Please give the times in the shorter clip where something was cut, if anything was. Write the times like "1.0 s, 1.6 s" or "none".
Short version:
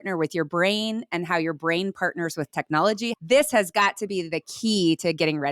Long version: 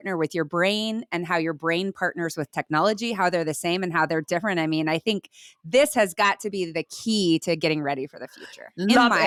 3.1 s